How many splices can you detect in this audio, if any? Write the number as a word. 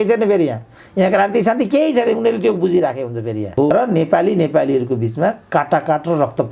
one